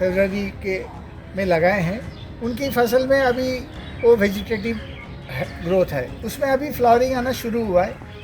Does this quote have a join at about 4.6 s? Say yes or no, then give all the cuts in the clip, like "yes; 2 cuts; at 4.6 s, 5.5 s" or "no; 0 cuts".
no; 1 cut; at 6.2 s